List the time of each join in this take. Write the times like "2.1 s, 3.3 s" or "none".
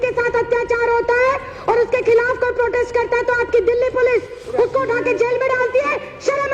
none